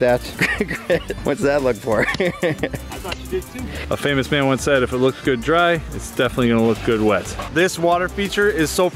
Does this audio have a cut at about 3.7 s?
yes; 2 cuts; at 3.7 s, 7.4 s

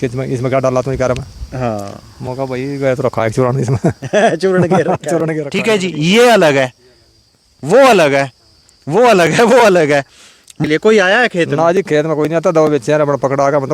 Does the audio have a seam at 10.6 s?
yes; 2 cuts; at 5.4 s, 10.6 s

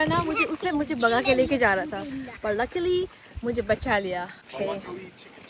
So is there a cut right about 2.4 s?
no; 1 cut; at 4.4 s

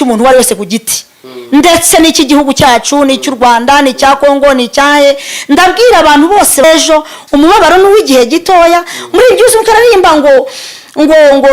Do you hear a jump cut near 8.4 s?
no; 1 cut; at 6.6 s

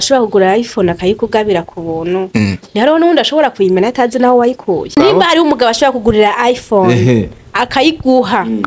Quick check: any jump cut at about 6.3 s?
no; 1 cut; at 4.9 s

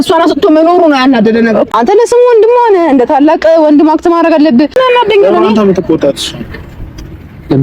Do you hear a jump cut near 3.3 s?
no; 2 cuts; at 1.7 s, 4.7 s

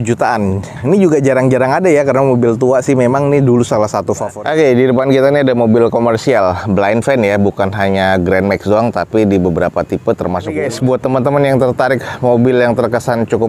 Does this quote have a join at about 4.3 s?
yes; 2 cuts; at 4.3 s, 10.6 s

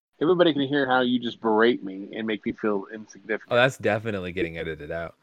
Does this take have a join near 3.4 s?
yes; 1 cut; at 3.4 s

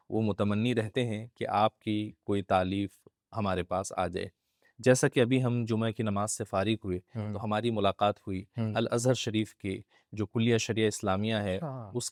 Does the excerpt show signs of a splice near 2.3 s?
no; 0 cuts

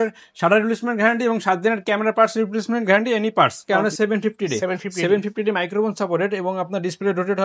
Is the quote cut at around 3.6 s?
yes; 1 cut; at 3.6 s

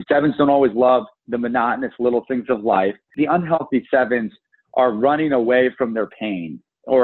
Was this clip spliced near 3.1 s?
yes; 1 cut; at 3.1 s

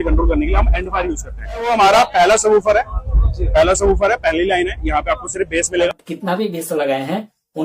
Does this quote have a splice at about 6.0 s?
yes; 2 cuts; at 1.7 s, 6.0 s

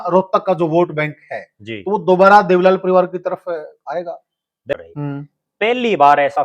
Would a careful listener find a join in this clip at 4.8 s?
yes; 1 cut; at 4.8 s

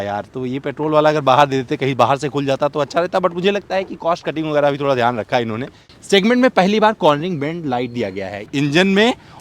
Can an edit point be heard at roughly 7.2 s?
no; 2 cuts; at 5.9 s, 8.5 s

